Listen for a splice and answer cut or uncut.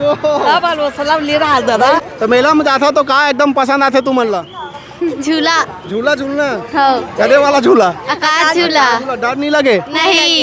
cut